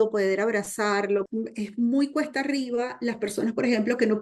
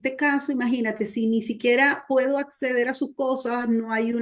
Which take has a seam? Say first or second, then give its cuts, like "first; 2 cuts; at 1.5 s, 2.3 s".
first; 1 cut; at 1.3 s